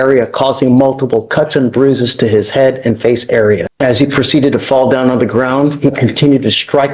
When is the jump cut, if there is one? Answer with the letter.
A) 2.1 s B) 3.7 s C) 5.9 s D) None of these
B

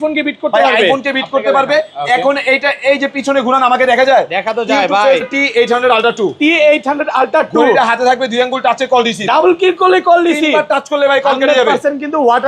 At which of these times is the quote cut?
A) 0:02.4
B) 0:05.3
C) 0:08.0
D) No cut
B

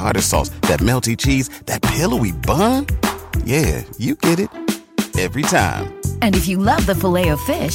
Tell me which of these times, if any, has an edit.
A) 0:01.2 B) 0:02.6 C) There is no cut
C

